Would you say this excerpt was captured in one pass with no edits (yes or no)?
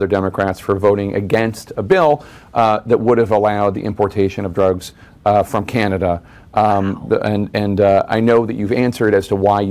yes